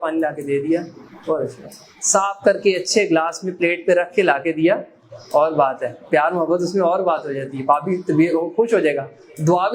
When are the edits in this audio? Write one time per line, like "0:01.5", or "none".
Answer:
none